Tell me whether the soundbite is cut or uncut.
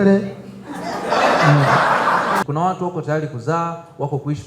cut